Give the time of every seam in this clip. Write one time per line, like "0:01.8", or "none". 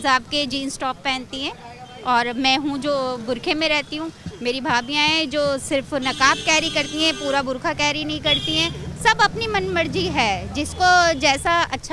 none